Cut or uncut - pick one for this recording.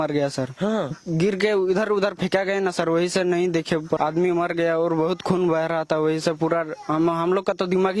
cut